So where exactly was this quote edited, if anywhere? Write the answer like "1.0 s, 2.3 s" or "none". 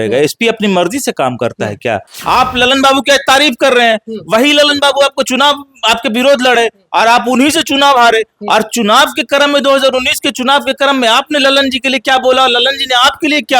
2.1 s